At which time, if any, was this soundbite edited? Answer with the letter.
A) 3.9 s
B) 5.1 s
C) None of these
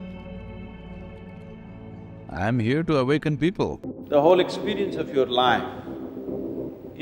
A